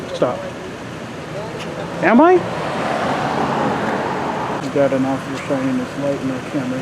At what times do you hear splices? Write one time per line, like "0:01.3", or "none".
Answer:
0:04.6